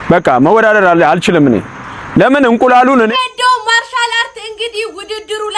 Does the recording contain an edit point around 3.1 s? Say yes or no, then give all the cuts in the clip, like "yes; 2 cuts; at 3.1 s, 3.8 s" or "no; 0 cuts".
yes; 1 cut; at 3.1 s